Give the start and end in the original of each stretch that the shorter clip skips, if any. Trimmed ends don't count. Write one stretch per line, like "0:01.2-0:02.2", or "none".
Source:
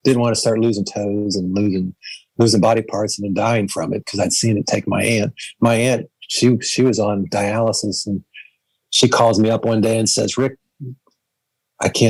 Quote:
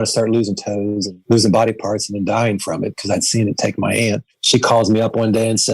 0:01.4-0:02.2
0:05.4-0:08.8